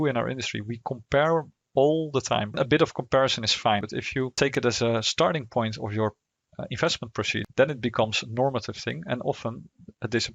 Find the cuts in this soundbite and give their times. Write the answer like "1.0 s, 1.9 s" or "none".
2.5 s, 3.8 s, 7.4 s